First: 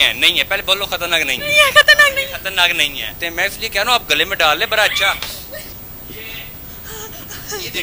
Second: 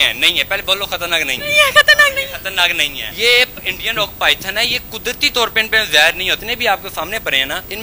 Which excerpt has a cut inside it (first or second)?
first